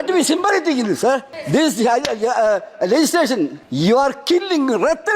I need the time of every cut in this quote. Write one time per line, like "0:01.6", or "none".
0:01.3
0:03.6